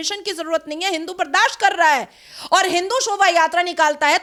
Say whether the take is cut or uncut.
uncut